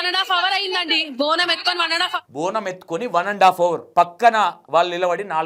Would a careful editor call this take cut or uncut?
cut